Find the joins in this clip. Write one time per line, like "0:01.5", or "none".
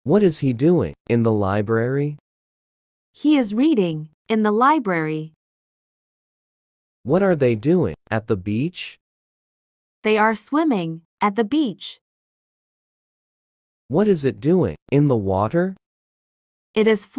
0:01.0